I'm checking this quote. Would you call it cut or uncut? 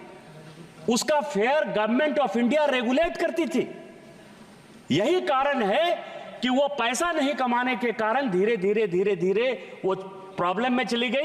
uncut